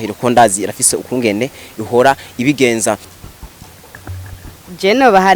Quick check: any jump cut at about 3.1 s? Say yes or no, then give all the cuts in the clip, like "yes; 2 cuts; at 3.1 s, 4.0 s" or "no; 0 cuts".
yes; 1 cut; at 3.1 s